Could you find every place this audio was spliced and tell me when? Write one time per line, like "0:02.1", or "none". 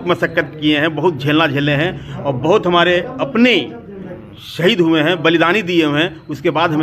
none